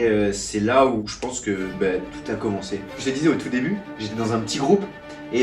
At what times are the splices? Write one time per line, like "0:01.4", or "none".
0:01.0
0:02.9